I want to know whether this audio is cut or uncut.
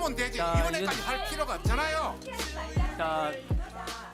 uncut